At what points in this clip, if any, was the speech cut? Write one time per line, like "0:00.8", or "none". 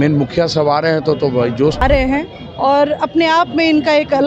0:01.8